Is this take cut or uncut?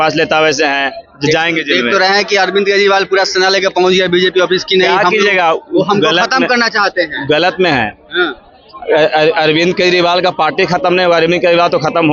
uncut